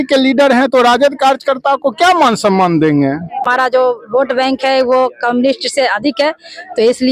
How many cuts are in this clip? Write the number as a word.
one